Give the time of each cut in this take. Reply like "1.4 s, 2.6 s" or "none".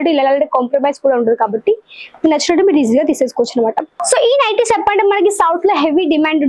3.9 s